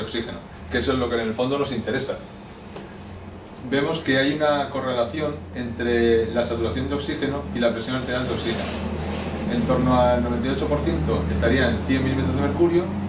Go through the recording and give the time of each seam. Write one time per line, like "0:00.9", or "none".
0:09.4